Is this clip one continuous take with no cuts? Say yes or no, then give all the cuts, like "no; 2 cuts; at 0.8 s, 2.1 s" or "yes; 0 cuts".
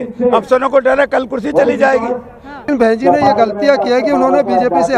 no; 1 cut; at 2.7 s